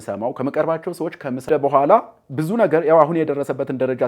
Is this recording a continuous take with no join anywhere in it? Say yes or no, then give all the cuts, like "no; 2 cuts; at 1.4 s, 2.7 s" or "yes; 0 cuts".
no; 1 cut; at 1.5 s